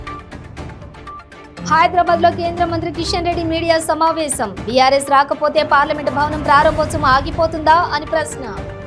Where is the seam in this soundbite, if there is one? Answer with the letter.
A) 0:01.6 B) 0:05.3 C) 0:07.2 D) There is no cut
A